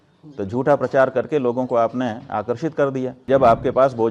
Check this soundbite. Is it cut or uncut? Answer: cut